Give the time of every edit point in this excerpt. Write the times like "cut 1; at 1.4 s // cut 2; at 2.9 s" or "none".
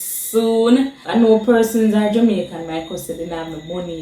cut 1; at 1.0 s